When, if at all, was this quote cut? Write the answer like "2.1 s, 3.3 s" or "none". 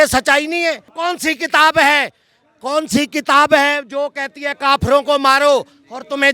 1.0 s